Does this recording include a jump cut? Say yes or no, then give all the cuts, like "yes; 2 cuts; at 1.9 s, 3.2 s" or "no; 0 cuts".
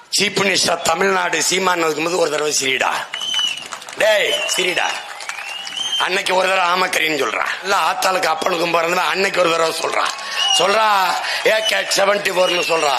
yes; 1 cut; at 7.6 s